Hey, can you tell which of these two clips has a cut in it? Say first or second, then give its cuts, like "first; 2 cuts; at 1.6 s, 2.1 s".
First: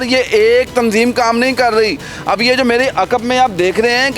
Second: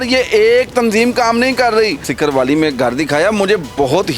second; 1 cut; at 2.1 s